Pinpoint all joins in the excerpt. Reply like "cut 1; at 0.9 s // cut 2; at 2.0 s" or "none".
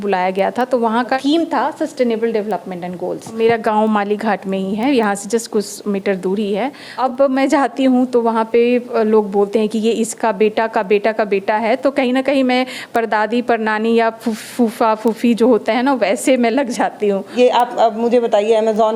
cut 1; at 1.2 s // cut 2; at 3.4 s // cut 3; at 6.9 s // cut 4; at 17.3 s

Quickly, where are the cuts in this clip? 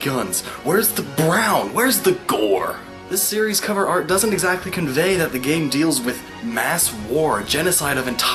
cut 1; at 6.0 s

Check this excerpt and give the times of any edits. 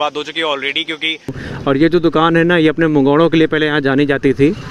cut 1; at 1.5 s

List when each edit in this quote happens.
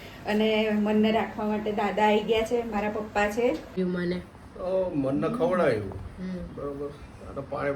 cut 1; at 3.8 s

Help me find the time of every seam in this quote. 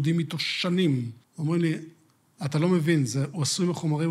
cut 1; at 1.2 s

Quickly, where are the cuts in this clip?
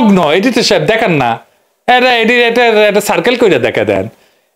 none

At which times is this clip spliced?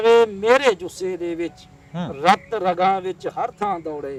none

